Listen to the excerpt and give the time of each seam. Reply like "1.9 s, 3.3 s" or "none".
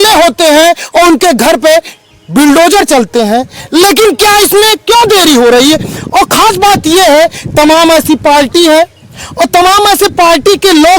none